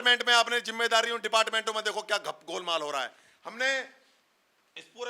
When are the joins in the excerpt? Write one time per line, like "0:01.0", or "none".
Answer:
none